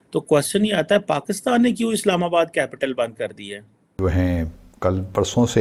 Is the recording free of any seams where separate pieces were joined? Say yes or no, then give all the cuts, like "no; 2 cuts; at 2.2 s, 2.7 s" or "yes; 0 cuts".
yes; 0 cuts